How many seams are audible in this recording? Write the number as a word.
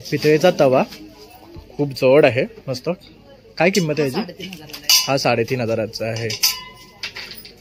zero